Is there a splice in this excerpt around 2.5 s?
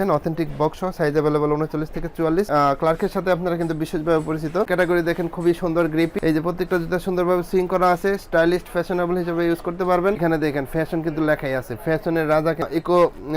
yes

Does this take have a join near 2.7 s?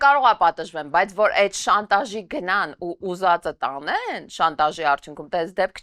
no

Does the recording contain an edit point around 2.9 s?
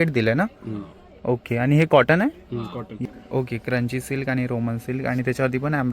yes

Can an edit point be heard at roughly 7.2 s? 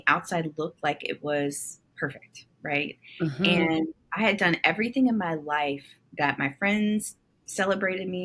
no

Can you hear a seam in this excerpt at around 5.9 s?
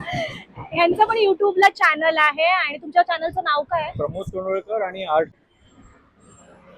yes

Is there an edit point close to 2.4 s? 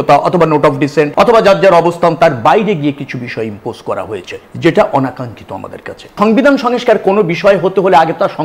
no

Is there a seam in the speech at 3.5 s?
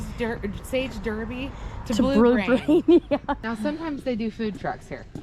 yes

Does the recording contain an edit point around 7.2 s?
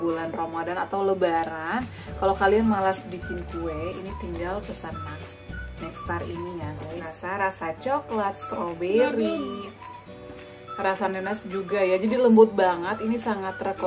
yes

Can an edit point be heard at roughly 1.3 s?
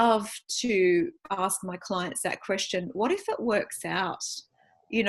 no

